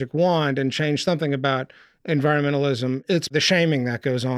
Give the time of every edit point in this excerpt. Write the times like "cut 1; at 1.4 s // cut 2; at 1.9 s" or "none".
cut 1; at 3.1 s